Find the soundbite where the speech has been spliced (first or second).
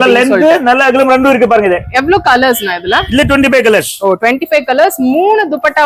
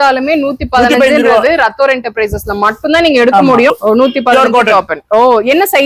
second